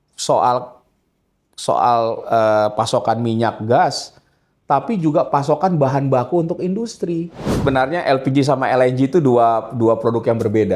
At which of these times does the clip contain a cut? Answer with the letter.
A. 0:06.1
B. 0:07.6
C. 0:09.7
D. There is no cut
B